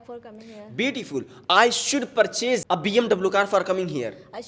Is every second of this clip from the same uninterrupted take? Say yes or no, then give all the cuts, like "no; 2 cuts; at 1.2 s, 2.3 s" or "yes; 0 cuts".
no; 1 cut; at 2.6 s